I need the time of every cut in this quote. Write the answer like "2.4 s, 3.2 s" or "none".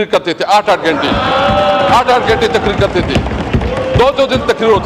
none